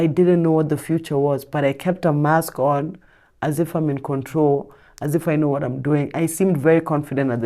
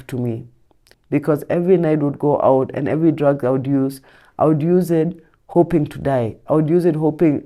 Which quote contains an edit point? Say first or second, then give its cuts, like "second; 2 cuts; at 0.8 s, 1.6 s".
second; 1 cut; at 0.9 s